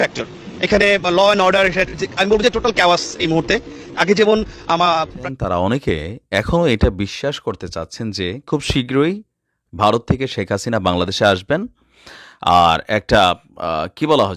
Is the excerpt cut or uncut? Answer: cut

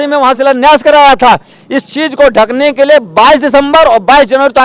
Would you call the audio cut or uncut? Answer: uncut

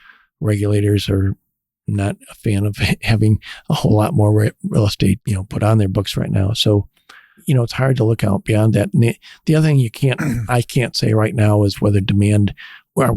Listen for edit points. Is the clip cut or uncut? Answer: cut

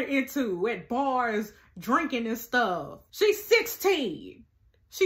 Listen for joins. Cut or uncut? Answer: cut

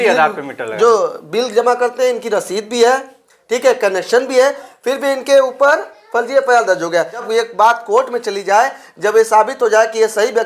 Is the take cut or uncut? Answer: cut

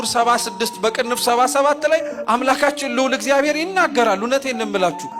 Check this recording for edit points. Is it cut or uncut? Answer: uncut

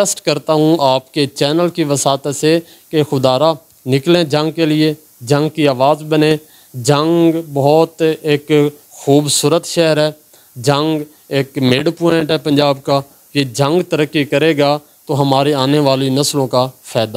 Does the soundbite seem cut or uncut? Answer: uncut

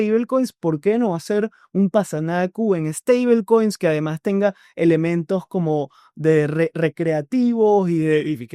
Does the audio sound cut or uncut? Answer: uncut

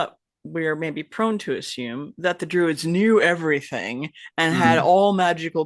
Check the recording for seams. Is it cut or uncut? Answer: uncut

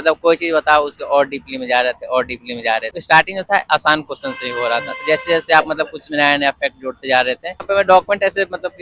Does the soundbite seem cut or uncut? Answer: cut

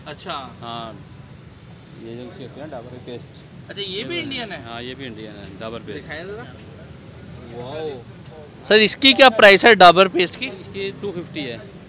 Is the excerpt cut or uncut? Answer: uncut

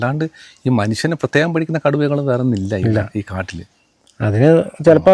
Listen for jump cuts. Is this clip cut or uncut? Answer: uncut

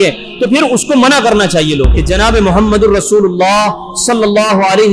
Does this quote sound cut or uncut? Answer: cut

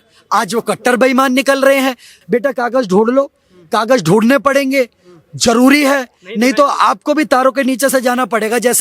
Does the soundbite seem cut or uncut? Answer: cut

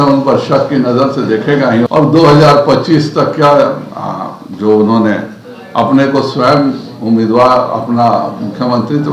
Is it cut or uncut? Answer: cut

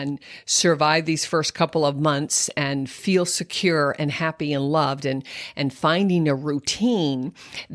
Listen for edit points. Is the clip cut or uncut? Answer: uncut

